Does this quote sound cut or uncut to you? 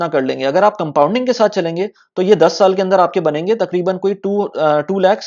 uncut